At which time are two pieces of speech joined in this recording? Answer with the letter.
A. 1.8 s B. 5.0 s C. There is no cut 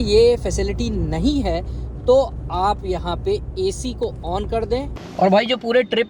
B